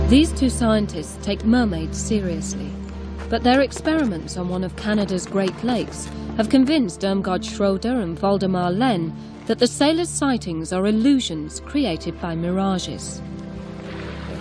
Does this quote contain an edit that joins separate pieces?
yes; 1 cut; at 6.0 s

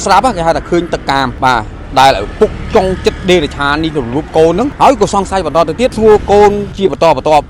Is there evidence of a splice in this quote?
yes; 4 cuts; at 1.3 s, 4.7 s, 5.9 s, 6.7 s

